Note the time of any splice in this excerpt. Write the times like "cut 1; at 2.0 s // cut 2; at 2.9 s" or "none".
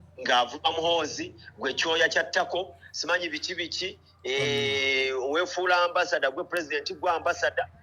none